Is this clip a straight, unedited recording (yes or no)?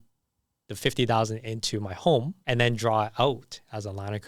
no